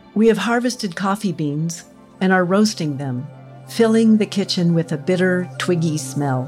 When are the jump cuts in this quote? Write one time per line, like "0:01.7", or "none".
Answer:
none